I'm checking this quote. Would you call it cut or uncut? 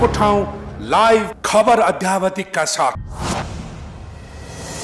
cut